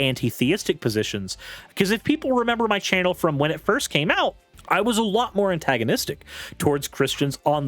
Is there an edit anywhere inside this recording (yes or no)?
yes